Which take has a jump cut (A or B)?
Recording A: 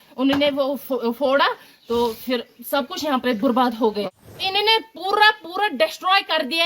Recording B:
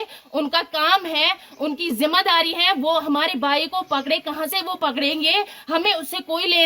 A